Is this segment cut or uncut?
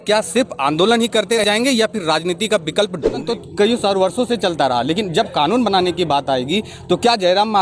cut